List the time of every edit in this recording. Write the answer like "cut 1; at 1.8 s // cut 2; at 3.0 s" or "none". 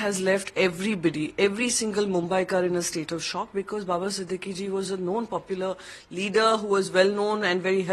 none